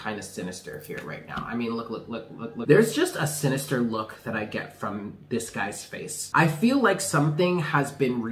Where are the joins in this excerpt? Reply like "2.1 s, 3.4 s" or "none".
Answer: 2.6 s, 6.2 s